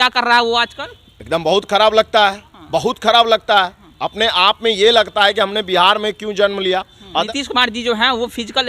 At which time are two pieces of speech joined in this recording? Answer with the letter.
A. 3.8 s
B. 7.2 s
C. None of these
B